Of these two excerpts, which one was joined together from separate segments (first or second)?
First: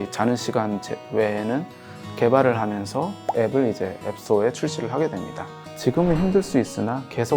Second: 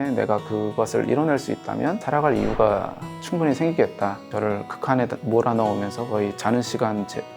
second